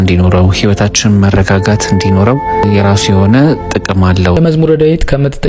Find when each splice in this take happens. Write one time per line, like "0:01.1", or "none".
0:02.6
0:04.4

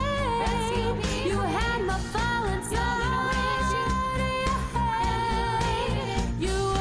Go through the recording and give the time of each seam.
none

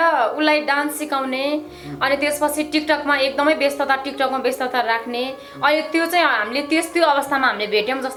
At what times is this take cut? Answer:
none

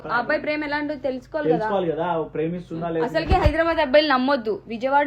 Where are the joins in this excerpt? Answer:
none

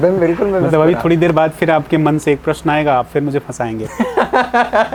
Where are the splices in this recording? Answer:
none

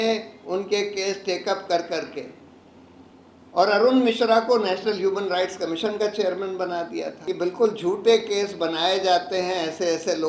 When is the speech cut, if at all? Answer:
0:07.2

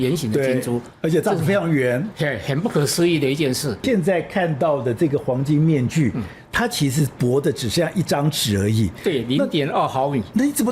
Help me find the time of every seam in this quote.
0:03.8

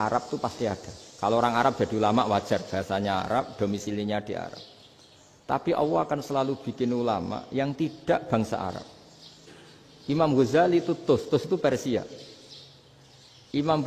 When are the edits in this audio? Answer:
none

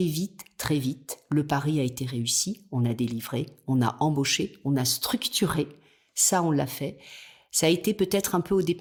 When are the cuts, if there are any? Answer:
none

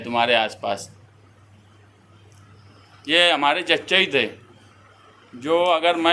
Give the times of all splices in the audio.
none

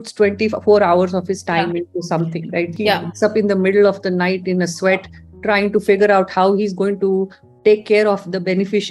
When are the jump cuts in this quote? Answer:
none

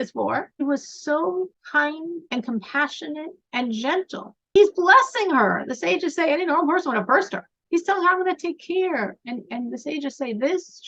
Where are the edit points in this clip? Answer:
0:07.5

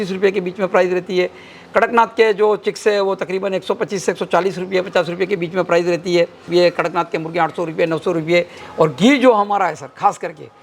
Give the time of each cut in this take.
0:06.5
0:08.6

